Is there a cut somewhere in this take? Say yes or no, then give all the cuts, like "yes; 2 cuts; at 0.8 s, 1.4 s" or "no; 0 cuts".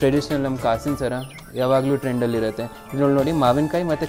no; 0 cuts